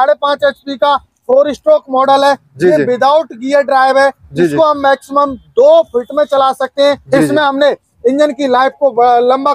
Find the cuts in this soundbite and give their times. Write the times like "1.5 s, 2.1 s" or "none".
7.0 s